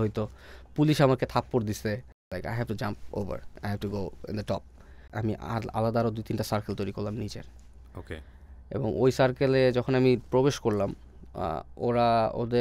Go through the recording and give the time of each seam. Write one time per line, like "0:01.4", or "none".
0:02.3
0:03.5
0:05.1